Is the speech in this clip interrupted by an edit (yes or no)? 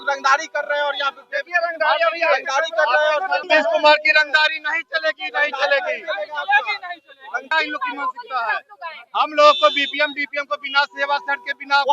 yes